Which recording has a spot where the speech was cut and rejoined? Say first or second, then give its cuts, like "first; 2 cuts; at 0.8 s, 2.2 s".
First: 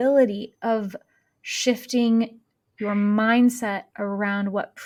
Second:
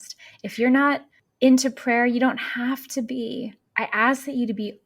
second; 1 cut; at 3.6 s